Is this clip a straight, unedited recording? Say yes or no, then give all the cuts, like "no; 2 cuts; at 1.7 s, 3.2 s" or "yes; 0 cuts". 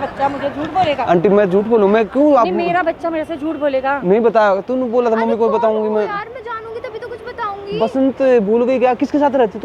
yes; 0 cuts